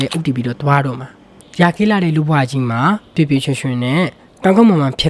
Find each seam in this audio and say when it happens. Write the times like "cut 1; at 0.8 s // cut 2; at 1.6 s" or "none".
cut 1; at 1.4 s